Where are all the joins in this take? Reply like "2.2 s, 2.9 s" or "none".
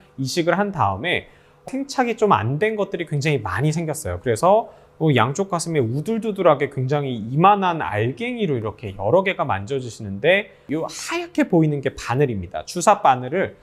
1.6 s, 10.6 s

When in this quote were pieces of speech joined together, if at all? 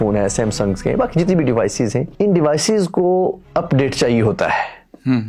2.1 s, 3.4 s

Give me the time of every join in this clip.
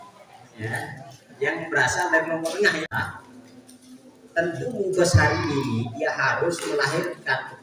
2.9 s

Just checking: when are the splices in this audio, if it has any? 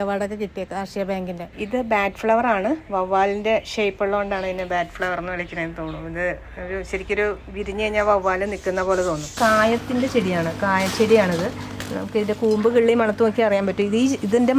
1.5 s, 9.3 s

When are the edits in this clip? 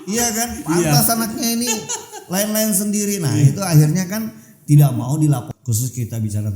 5.5 s

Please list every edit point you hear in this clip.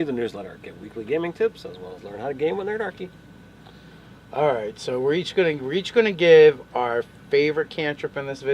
3.9 s

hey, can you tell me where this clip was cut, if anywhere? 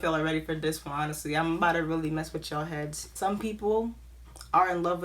3.0 s

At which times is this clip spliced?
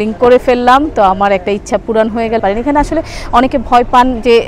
none

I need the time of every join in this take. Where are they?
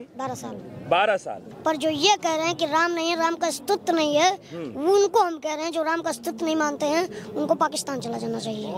1.5 s

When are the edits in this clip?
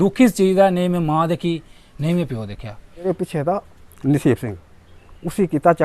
3.1 s

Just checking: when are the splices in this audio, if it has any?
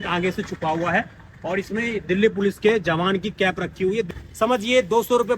4.1 s

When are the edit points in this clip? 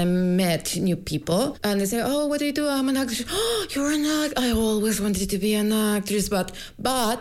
1.6 s

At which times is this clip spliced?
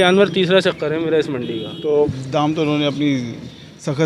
2.1 s

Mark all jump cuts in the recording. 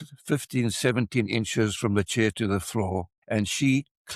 3.2 s

